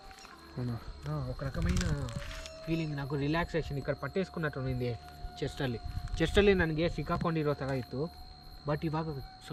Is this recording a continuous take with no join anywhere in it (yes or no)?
yes